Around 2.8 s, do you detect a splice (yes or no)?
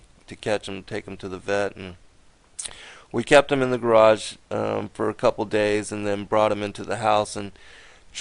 no